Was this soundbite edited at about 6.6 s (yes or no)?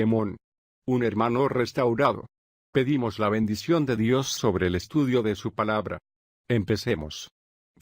no